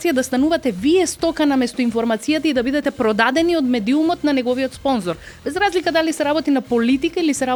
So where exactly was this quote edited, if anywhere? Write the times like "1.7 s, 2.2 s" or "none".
none